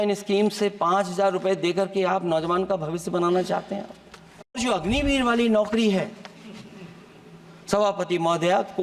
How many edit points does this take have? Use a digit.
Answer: 1